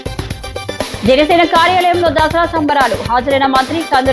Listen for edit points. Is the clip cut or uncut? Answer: cut